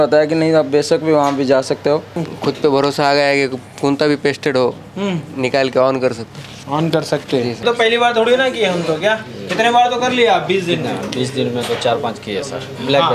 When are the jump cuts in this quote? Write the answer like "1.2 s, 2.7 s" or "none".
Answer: 2.3 s, 7.6 s